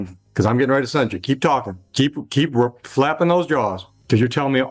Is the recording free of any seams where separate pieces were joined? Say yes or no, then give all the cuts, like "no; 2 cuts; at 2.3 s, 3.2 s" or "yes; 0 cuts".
yes; 0 cuts